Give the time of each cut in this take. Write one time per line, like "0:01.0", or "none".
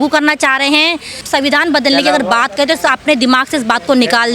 0:01.2